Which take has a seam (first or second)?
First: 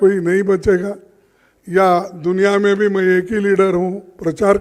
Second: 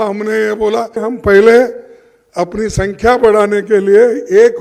second